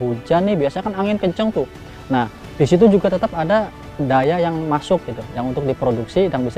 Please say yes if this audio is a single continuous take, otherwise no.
no